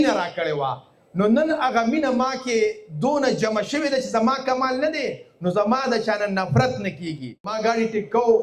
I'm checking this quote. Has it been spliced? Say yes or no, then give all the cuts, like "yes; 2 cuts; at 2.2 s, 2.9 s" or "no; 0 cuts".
yes; 1 cut; at 7.5 s